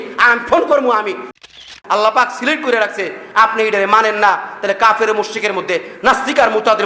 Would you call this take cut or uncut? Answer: cut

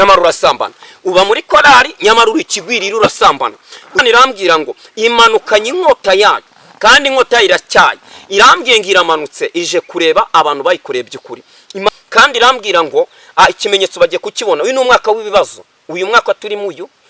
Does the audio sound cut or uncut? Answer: cut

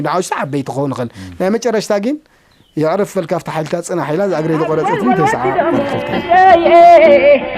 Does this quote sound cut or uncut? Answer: cut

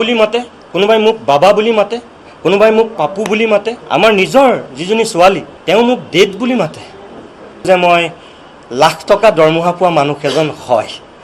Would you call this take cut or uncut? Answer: cut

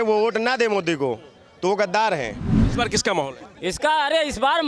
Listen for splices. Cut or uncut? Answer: cut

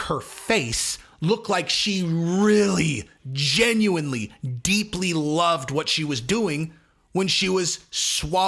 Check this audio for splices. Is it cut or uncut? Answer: uncut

